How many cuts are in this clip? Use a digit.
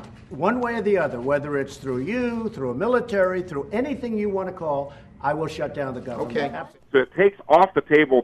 1